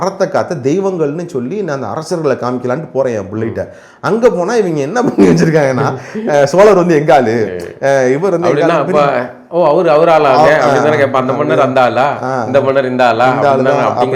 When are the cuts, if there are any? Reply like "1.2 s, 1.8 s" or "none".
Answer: none

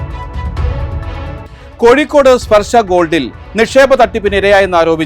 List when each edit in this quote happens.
1.6 s

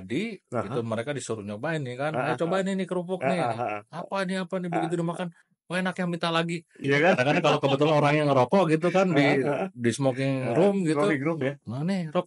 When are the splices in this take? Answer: 6.8 s

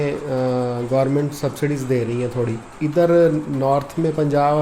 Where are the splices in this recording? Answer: 2.6 s

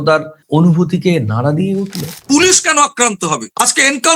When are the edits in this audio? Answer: 2.2 s

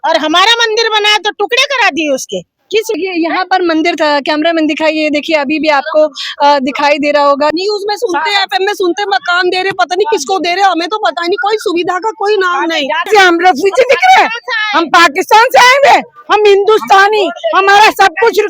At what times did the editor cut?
2.9 s, 7.5 s, 13.1 s

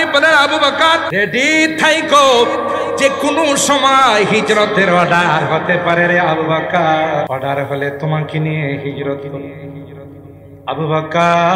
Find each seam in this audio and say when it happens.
1.1 s, 7.3 s

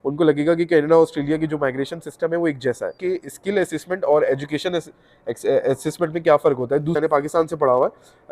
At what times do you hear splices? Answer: 3.0 s, 7.0 s

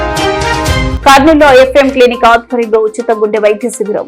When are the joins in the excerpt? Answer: 0.9 s

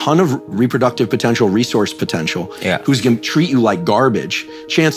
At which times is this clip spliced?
none

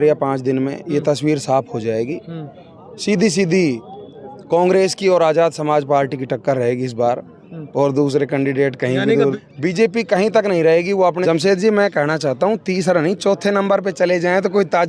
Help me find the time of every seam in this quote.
9.3 s, 11.2 s

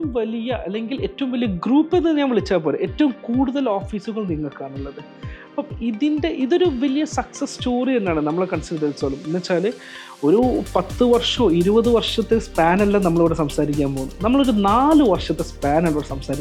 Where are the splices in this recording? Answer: none

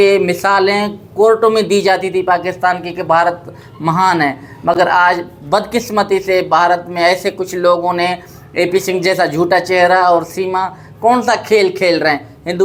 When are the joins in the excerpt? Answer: none

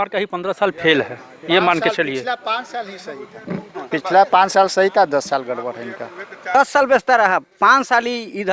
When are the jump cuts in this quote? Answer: 6.4 s

